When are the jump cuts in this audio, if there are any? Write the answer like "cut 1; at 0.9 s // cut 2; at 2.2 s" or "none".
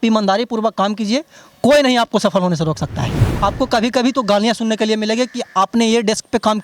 cut 1; at 3.2 s